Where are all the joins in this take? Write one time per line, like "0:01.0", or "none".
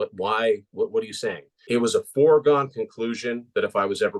0:01.5